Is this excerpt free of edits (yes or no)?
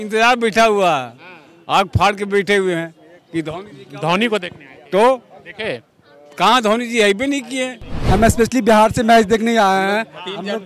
no